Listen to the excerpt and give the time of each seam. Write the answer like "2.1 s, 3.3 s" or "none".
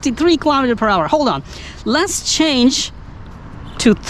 none